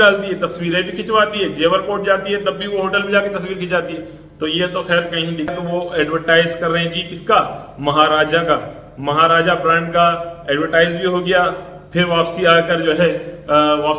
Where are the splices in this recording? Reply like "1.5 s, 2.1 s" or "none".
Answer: 5.5 s